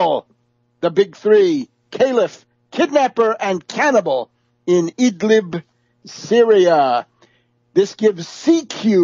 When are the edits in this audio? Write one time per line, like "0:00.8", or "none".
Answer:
0:07.8